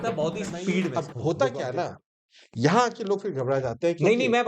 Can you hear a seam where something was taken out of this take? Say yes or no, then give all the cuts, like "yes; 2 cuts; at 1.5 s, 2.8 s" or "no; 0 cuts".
yes; 1 cut; at 1.0 s